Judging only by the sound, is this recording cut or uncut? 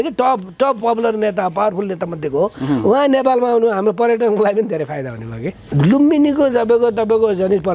cut